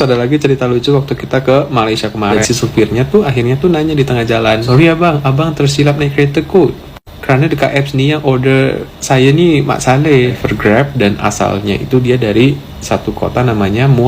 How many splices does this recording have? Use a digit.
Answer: 3